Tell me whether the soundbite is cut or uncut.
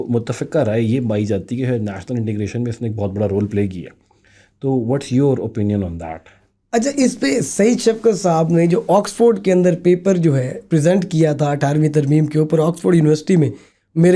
uncut